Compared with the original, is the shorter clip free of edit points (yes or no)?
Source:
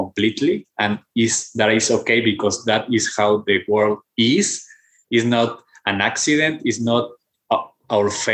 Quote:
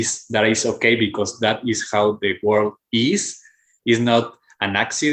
yes